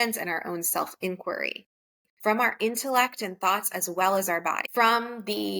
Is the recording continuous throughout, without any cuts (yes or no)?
no